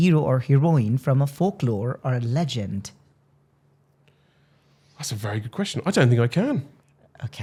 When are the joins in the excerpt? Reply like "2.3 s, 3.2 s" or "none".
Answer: none